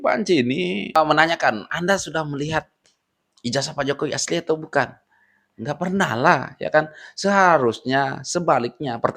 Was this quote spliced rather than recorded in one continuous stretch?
no; 0 cuts

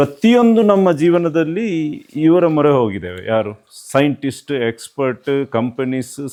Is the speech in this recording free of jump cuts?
yes; 0 cuts

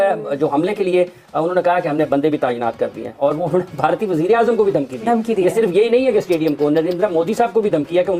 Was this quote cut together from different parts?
no; 0 cuts

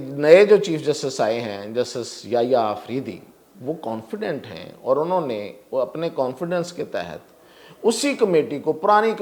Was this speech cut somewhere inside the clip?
no; 0 cuts

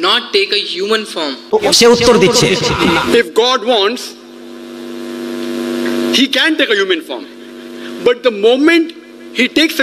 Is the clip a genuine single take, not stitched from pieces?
no; 1 cut; at 2.8 s

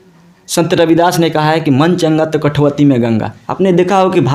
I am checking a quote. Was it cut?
no; 0 cuts

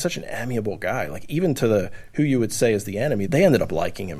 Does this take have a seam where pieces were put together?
yes; 1 cut; at 3.2 s

